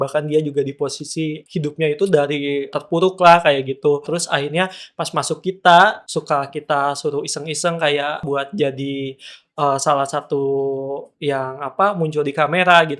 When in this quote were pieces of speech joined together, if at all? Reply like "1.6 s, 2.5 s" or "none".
1.4 s, 2.7 s, 4.1 s, 6.0 s, 8.2 s